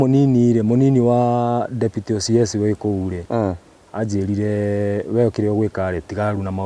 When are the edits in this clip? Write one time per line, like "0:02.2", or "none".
0:03.2